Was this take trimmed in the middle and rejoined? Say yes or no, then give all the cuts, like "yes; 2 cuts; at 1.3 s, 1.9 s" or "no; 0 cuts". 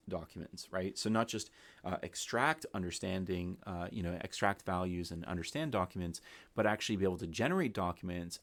no; 0 cuts